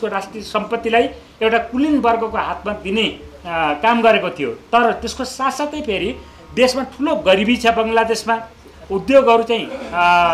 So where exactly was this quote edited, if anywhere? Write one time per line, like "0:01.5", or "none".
none